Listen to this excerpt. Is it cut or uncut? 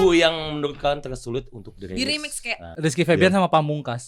cut